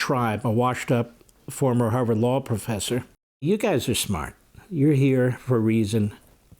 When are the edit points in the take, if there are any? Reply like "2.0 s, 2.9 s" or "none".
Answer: 3.4 s

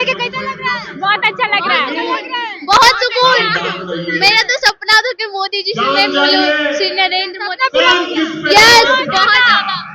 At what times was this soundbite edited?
none

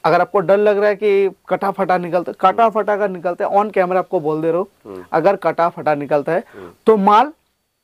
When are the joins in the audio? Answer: none

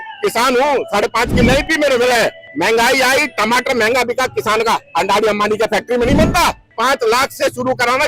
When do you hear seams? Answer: 2.4 s, 6.7 s

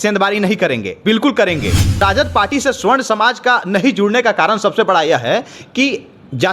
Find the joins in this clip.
2.0 s

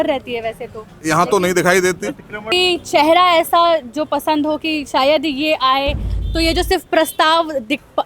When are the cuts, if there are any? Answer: 2.5 s

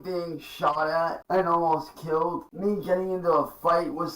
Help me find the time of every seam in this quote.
1.2 s, 2.5 s

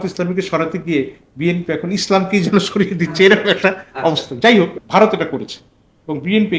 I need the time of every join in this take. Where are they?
4.8 s

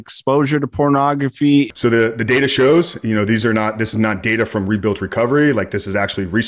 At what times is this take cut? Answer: 1.7 s

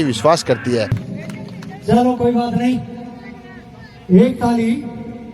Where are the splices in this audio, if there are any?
1.1 s

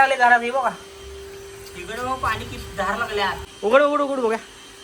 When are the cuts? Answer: 3.5 s

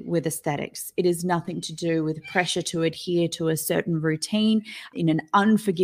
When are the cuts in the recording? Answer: 4.9 s

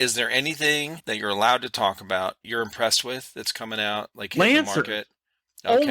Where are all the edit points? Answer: 1.0 s, 2.4 s

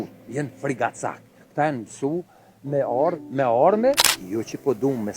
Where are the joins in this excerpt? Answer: 4.1 s

